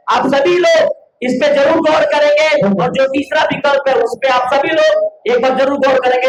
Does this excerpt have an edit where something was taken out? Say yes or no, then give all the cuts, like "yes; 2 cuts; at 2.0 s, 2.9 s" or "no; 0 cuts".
no; 0 cuts